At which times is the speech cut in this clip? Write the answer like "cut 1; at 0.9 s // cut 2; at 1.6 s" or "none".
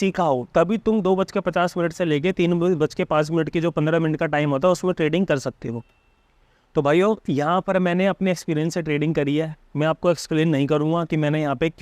none